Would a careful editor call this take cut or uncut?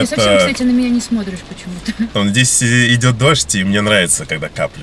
cut